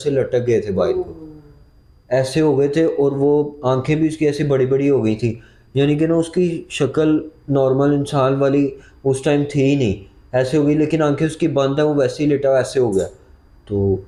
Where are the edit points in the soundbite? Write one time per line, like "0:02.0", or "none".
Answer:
none